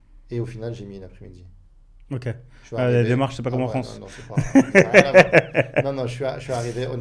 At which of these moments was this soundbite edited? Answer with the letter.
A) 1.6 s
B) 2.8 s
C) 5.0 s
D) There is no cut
D